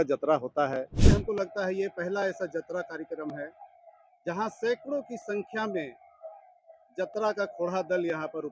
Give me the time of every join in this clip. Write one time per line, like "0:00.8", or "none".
0:01.0